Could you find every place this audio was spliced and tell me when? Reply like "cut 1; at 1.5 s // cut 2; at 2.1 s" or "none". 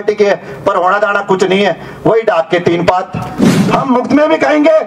cut 1; at 3.5 s